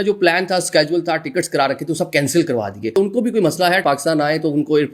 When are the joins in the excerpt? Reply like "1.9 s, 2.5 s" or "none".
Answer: 2.9 s, 3.8 s